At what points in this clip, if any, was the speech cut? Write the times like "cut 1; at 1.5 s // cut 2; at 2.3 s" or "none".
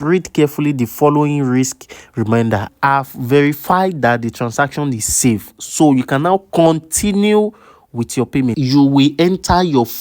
cut 1; at 2.7 s // cut 2; at 8.6 s